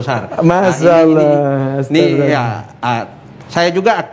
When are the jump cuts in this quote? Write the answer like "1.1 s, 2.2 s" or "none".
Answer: none